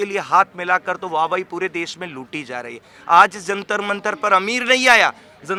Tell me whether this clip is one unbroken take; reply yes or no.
yes